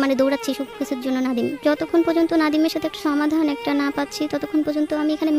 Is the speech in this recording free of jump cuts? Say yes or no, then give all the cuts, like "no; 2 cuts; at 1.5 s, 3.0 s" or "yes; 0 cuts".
no; 2 cuts; at 1.6 s, 3.0 s